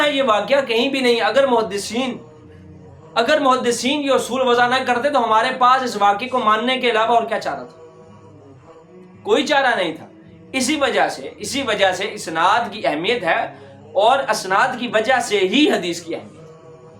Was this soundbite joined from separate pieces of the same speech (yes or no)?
no